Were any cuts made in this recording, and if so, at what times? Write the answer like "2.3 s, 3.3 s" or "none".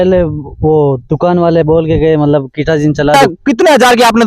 3.2 s